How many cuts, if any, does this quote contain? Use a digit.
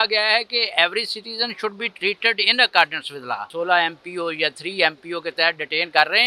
1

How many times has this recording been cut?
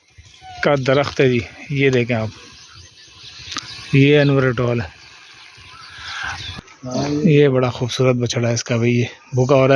1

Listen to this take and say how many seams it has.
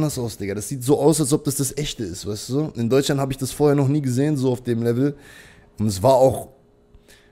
0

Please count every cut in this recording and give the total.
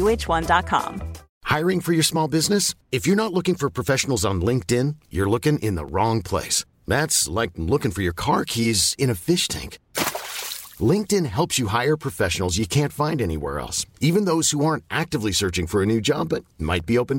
1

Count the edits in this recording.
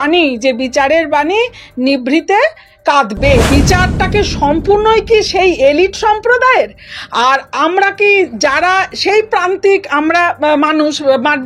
1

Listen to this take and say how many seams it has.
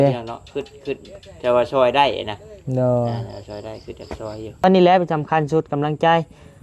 1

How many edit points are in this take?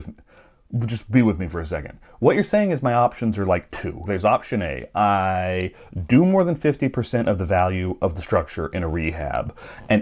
1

